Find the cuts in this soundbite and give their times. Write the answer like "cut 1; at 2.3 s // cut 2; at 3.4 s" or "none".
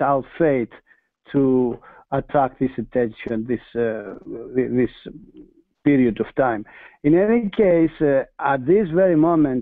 cut 1; at 6.0 s